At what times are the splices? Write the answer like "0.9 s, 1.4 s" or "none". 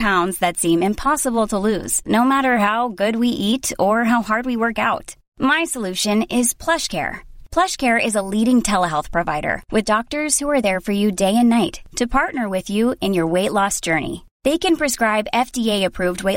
none